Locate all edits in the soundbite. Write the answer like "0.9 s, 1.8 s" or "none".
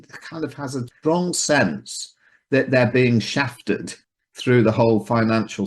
0.9 s, 3.9 s